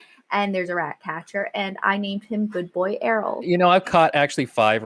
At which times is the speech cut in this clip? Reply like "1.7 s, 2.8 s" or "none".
3.4 s